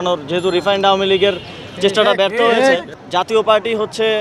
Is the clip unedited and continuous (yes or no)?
no